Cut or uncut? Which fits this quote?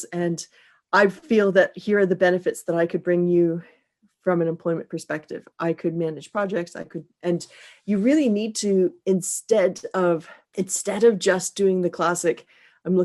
cut